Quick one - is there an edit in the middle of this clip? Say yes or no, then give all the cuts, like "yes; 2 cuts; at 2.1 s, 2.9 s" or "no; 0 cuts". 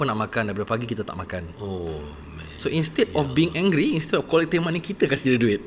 no; 0 cuts